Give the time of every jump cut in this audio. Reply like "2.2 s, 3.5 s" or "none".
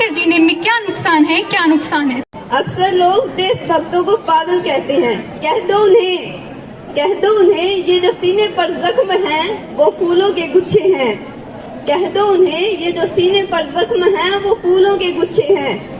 2.3 s